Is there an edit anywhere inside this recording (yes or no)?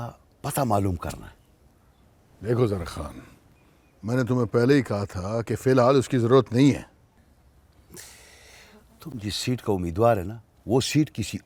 no